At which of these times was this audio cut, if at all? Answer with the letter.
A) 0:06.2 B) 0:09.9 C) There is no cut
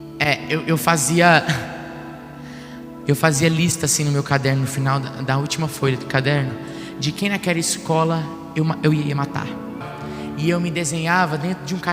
B